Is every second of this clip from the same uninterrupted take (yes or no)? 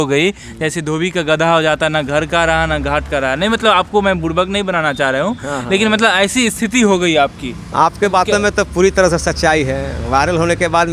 yes